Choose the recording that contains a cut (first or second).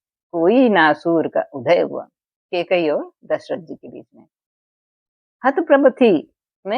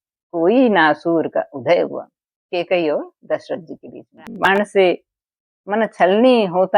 second